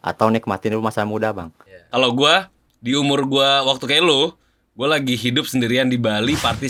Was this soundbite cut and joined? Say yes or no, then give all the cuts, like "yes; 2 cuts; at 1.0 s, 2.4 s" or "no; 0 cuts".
no; 0 cuts